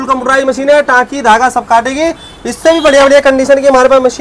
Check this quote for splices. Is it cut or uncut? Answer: uncut